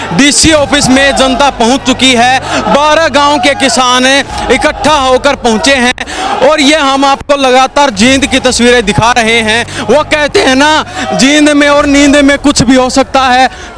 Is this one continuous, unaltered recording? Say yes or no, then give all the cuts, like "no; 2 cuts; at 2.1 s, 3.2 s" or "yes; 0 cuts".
yes; 0 cuts